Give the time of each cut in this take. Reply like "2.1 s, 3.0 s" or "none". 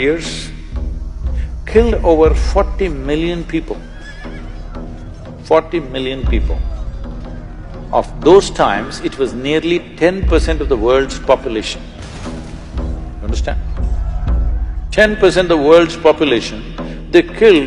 none